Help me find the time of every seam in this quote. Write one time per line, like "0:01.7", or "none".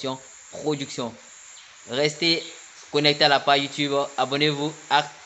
none